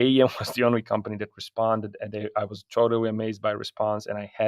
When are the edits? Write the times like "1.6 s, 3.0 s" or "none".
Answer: none